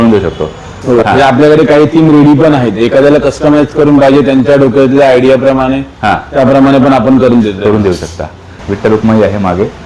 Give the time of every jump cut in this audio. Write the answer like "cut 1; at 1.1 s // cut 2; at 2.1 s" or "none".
cut 1; at 1.0 s // cut 2; at 8.5 s